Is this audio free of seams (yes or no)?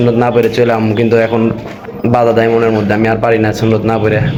yes